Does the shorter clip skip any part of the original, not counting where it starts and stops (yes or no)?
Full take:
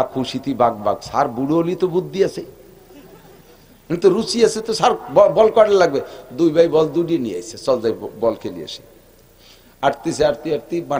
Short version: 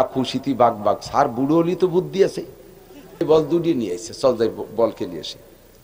yes